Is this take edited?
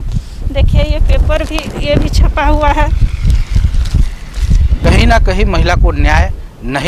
yes; 1 cut; at 4.8 s

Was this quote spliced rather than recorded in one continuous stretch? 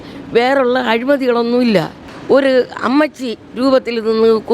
yes; 1 cut; at 2.1 s

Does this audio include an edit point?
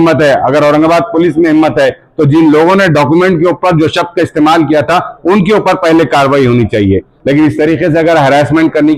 yes; 1 cut; at 7.1 s

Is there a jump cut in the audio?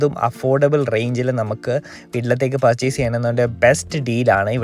no; 0 cuts

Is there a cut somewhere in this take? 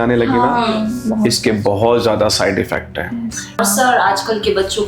yes; 1 cut; at 3.6 s

